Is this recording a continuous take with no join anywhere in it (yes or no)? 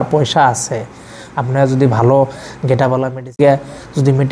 no